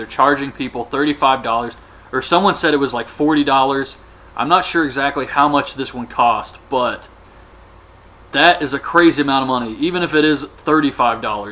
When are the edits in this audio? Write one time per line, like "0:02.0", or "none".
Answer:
none